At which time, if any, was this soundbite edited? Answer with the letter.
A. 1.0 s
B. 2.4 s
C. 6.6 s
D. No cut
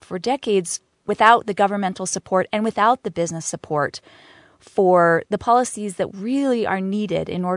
A